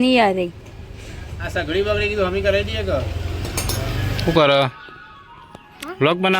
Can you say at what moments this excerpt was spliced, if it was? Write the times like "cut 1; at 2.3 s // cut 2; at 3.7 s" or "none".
cut 1; at 4.3 s